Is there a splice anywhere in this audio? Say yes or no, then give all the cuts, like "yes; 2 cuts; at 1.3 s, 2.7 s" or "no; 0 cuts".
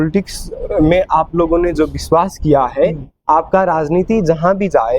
no; 0 cuts